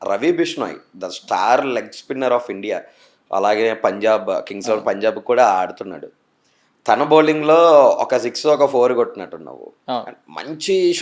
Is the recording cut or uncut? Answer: uncut